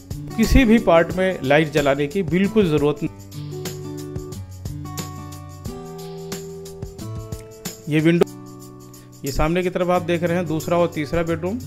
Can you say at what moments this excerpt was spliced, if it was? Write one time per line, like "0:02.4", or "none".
0:03.1
0:08.2